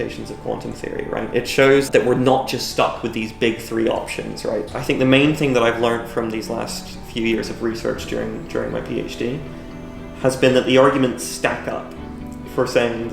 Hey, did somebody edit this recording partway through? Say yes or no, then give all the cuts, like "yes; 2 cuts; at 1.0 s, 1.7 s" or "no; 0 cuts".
yes; 2 cuts; at 1.9 s, 4.6 s